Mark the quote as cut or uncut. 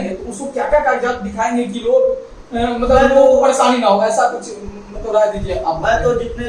uncut